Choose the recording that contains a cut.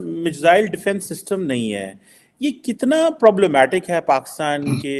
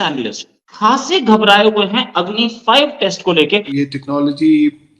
second; 1 cut; at 3.7 s

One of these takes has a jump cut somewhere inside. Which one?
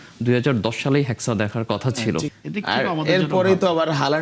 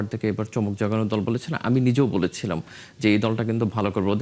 first; 1 cut; at 2.3 s

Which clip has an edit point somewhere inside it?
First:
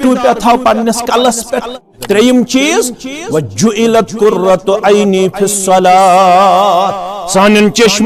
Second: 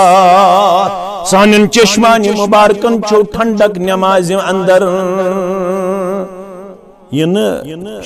first; 1 cut; at 1.9 s

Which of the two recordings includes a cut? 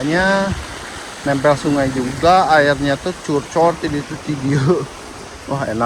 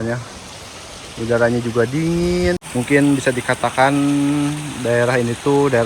second; 1 cut; at 2.6 s

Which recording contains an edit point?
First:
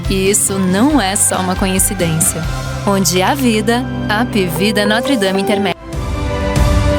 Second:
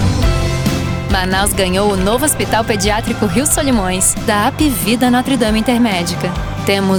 first; 1 cut; at 5.9 s

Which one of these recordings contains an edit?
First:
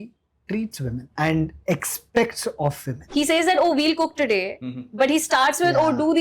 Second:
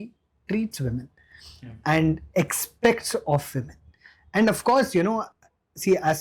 first; 2 cuts; at 1.1 s, 2.9 s

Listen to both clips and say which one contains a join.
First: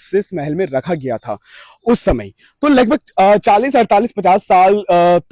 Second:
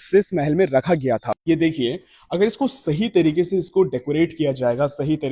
second; 1 cut; at 1.3 s

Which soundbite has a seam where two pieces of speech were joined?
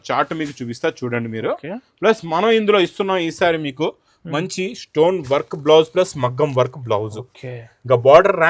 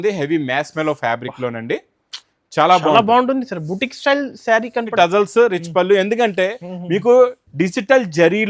second; 1 cut; at 4.9 s

